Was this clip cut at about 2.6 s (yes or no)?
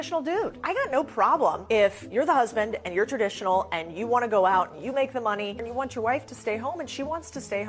no